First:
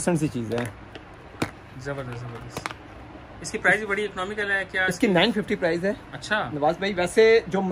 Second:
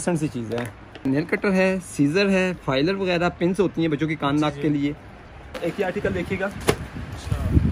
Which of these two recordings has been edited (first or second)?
second